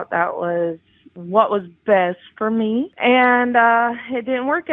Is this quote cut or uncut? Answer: cut